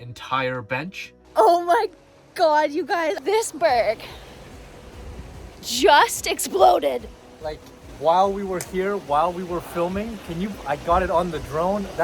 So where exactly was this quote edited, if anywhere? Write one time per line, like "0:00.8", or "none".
0:01.1
0:03.2